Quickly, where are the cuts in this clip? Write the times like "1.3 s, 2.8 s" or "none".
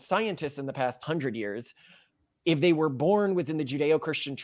1.0 s